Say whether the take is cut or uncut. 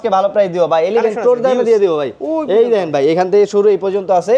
uncut